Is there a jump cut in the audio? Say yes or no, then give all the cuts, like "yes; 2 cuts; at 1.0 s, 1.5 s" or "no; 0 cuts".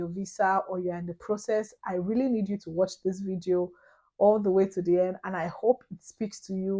no; 0 cuts